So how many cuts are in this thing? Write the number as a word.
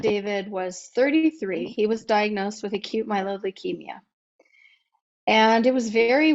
one